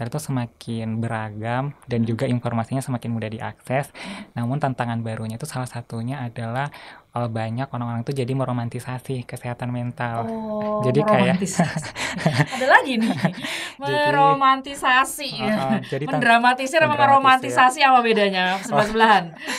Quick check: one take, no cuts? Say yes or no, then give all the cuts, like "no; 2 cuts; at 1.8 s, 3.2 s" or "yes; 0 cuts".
yes; 0 cuts